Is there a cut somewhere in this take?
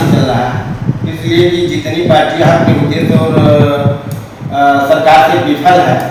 no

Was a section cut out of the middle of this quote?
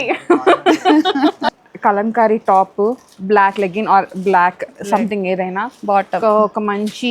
yes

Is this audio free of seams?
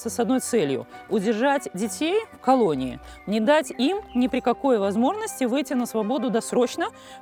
yes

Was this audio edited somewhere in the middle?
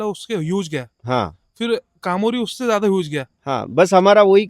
no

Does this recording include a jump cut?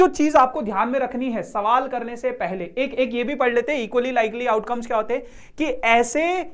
no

